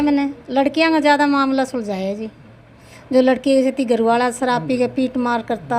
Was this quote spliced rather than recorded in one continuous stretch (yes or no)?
no